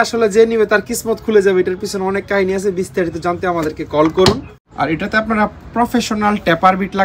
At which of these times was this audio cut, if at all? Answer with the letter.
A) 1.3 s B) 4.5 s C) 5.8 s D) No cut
B